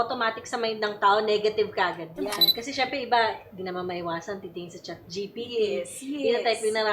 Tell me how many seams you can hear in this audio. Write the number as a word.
one